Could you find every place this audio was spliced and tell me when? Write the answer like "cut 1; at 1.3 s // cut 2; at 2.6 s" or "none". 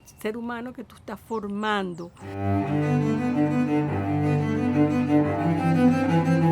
cut 1; at 2.2 s